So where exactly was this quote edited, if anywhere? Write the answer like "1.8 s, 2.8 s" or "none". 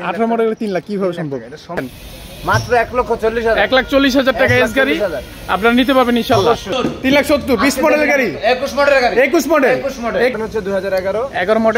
1.8 s, 6.7 s, 10.3 s